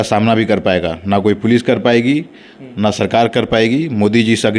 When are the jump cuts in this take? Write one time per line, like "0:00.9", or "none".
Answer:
none